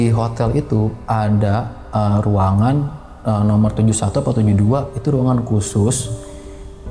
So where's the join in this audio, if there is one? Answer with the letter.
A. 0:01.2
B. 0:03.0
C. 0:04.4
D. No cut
D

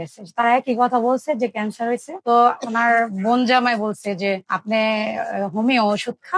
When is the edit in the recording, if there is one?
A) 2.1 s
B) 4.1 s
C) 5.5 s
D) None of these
A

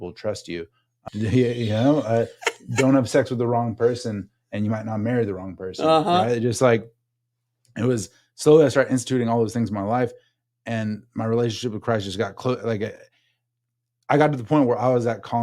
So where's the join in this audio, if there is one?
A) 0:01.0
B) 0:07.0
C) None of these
A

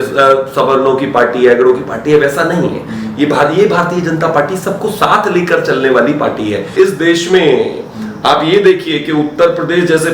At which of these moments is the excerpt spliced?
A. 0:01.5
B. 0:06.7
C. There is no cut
B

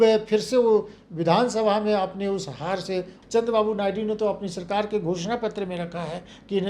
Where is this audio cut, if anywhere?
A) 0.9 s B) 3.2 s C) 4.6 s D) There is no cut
B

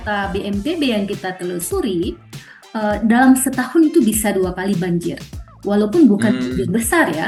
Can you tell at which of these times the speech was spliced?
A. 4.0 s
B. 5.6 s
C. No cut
C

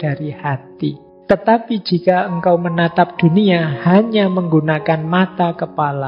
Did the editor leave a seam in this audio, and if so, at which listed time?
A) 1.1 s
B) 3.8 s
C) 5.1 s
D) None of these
A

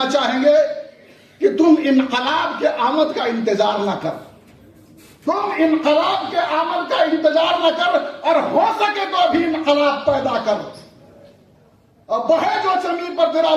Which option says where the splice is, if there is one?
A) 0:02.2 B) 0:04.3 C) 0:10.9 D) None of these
D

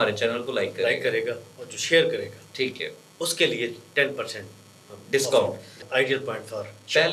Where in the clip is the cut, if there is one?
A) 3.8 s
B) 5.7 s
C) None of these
B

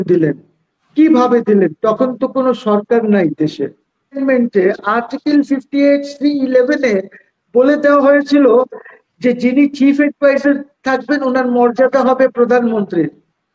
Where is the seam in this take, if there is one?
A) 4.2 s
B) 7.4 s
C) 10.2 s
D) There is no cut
A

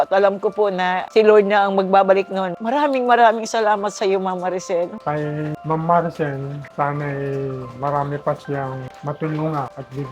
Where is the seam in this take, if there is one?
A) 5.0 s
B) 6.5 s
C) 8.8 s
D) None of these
A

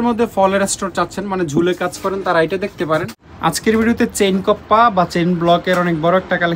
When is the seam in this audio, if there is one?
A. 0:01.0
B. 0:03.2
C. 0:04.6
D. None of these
B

